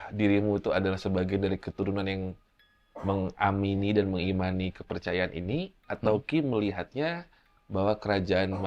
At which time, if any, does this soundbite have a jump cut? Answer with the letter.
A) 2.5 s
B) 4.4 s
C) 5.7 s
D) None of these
D